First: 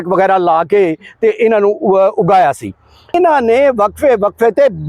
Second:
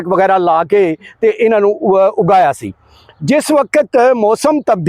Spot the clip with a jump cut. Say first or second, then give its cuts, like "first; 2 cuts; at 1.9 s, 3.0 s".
first; 1 cut; at 3.1 s